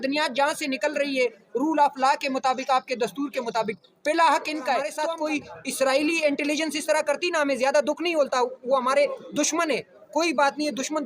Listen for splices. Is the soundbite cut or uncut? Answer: cut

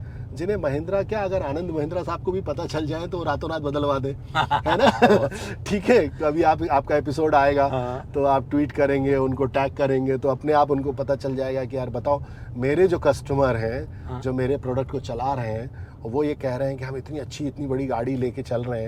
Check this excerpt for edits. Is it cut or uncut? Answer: uncut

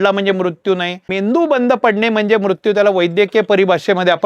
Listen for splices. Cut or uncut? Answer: cut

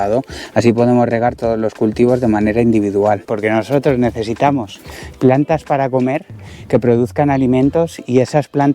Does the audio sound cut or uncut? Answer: cut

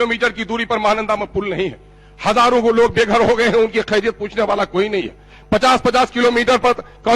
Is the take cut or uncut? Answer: uncut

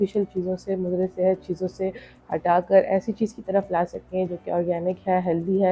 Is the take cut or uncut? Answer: uncut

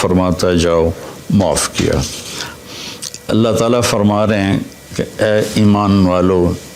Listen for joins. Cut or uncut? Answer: cut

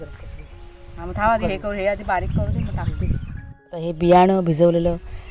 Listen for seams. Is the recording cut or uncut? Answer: cut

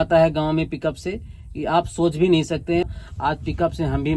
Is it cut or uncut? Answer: cut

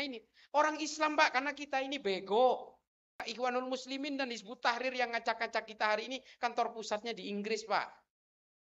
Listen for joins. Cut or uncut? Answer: cut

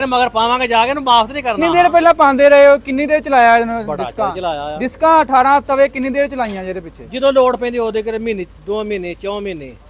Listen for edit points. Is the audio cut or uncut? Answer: cut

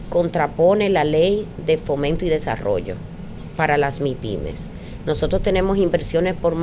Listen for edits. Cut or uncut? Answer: uncut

